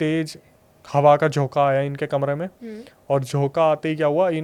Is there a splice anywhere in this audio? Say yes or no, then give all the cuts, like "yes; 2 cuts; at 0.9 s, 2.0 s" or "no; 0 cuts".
no; 0 cuts